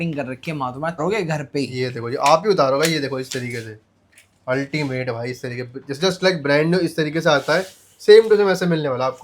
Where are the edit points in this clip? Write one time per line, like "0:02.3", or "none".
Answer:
0:01.0